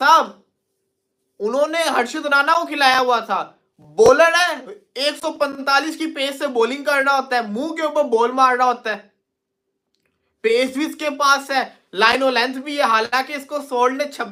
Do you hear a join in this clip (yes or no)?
no